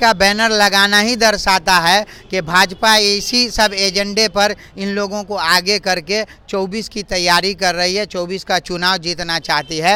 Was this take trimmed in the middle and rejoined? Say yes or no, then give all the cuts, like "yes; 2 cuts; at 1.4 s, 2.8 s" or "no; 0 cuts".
no; 0 cuts